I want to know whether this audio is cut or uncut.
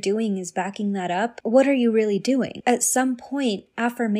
cut